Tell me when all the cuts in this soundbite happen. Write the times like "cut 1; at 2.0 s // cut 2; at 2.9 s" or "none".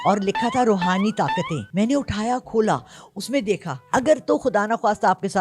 cut 1; at 1.6 s // cut 2; at 3.7 s